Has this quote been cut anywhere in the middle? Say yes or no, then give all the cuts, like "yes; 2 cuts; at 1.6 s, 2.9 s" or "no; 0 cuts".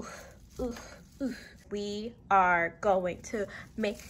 yes; 1 cut; at 1.6 s